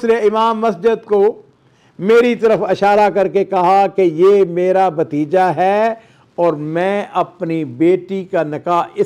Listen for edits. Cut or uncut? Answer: uncut